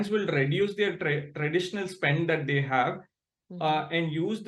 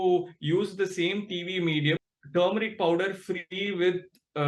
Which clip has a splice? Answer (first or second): second